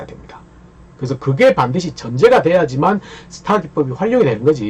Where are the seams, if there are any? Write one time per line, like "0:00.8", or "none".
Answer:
none